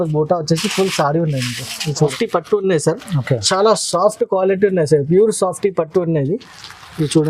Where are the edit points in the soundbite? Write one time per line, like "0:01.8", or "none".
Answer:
0:02.0